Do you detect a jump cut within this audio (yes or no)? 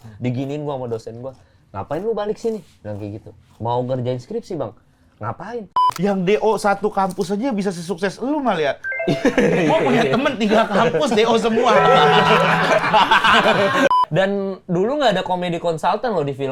yes